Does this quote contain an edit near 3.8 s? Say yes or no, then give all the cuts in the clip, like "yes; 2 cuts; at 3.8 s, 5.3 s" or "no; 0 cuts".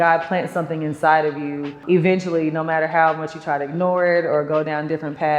no; 1 cut; at 1.8 s